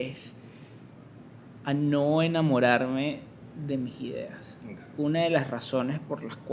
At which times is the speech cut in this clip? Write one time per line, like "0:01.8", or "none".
0:04.8